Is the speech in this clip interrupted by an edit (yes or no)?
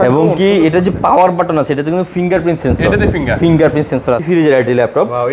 yes